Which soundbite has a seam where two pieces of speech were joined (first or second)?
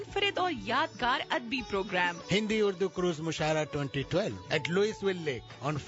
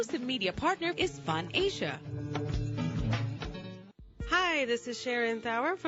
second